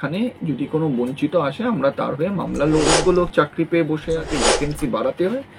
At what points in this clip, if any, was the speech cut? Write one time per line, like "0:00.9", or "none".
0:02.9
0:04.3

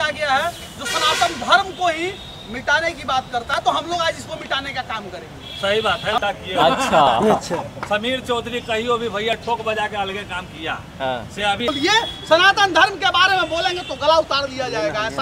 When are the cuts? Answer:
0:06.2
0:11.7

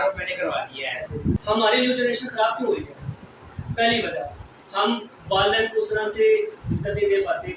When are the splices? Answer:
0:01.4

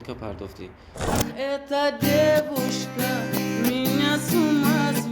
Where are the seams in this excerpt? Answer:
0:01.1

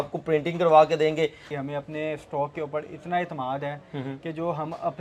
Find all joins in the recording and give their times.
0:01.4

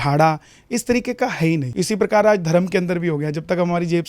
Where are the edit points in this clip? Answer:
0:01.7

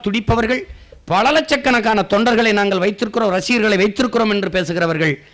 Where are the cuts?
none

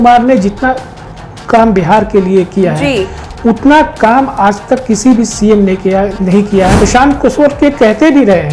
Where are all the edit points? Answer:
0:06.7

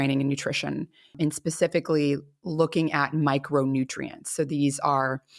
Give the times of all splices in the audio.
0:01.2

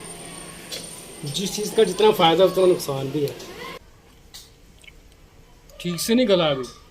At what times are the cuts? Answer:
0:03.7

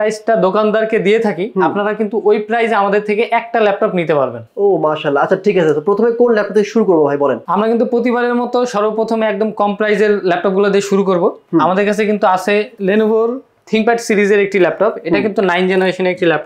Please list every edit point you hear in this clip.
none

